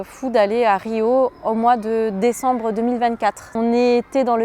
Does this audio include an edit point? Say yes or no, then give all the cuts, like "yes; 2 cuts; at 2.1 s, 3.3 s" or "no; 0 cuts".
yes; 1 cut; at 3.4 s